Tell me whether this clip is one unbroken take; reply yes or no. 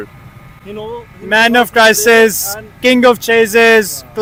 yes